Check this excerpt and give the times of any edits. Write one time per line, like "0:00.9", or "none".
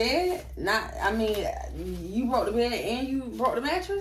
none